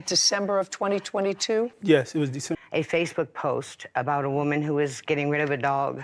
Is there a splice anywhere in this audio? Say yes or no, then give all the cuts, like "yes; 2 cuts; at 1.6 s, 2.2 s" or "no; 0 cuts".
yes; 1 cut; at 2.5 s